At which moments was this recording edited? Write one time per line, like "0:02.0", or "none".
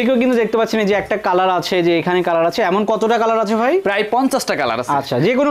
none